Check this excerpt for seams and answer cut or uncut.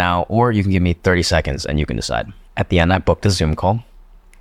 cut